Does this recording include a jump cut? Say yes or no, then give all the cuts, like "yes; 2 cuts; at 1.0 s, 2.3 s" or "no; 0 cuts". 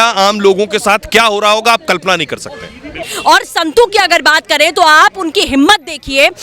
yes; 1 cut; at 3.1 s